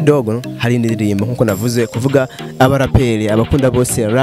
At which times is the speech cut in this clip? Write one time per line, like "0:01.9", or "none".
none